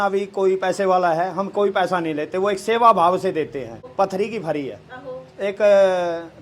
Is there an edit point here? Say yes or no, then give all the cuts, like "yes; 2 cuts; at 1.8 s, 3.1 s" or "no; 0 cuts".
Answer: yes; 1 cut; at 3.8 s